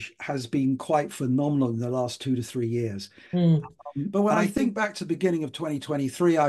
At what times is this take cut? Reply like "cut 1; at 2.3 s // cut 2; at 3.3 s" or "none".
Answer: cut 1; at 4.1 s

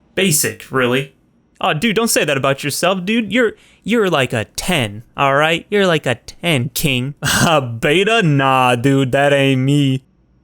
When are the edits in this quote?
cut 1; at 7.2 s

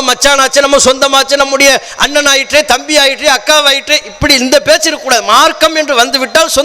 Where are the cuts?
none

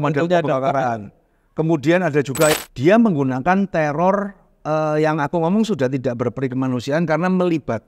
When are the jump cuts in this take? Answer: cut 1; at 2.5 s

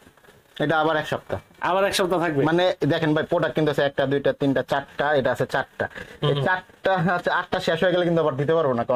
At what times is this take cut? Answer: none

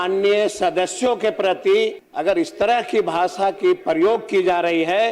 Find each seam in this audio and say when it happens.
cut 1; at 2.1 s

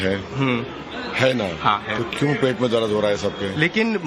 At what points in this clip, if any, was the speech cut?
cut 1; at 2.1 s

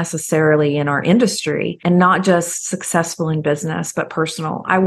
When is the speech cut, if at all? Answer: cut 1; at 1.8 s

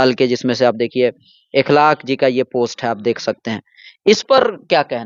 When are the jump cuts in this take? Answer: none

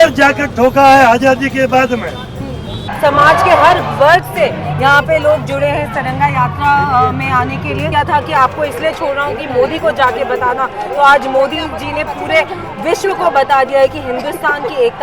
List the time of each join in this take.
cut 1; at 2.8 s // cut 2; at 7.9 s

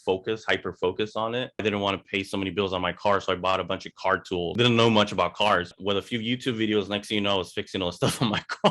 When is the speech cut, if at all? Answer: cut 1; at 1.6 s // cut 2; at 4.5 s // cut 3; at 5.7 s

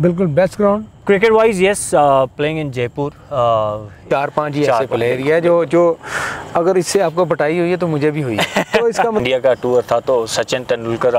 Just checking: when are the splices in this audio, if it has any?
cut 1; at 4.0 s // cut 2; at 9.2 s

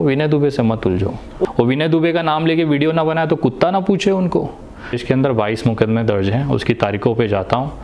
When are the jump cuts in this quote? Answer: cut 1; at 1.5 s // cut 2; at 5.0 s

